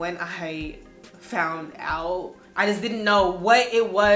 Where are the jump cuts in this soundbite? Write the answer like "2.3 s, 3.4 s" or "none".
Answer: 2.4 s